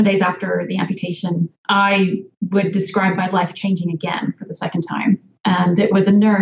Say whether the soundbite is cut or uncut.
cut